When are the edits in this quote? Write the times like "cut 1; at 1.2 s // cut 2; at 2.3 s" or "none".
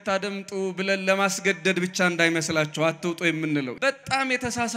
cut 1; at 3.7 s